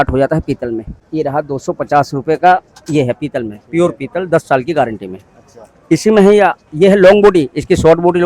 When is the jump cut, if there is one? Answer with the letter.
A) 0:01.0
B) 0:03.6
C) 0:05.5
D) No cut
A